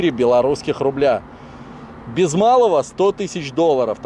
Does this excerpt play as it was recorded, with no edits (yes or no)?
yes